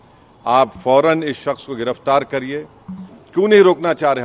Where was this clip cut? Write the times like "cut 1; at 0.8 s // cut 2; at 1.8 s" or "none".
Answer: cut 1; at 3.1 s

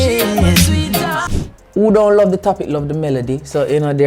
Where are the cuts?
cut 1; at 1.2 s

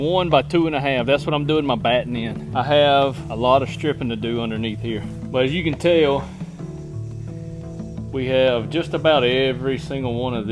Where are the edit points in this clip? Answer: none

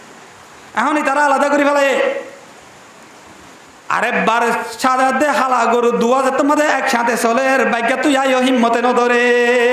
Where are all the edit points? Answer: none

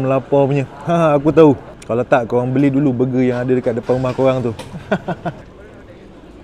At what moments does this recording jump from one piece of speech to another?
cut 1; at 1.8 s // cut 2; at 5.4 s

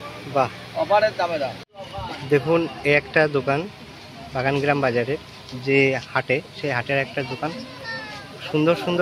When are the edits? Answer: cut 1; at 1.6 s

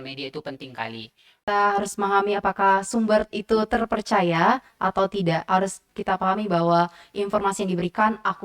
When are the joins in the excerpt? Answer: cut 1; at 1.5 s

